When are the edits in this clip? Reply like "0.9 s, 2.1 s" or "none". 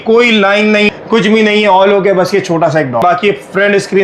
0.9 s, 3.0 s